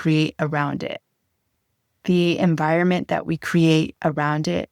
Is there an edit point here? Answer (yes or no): no